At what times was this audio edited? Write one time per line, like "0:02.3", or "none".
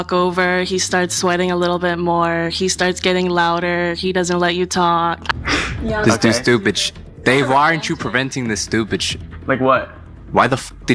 0:05.2